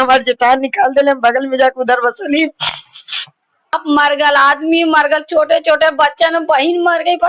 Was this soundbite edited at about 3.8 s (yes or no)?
yes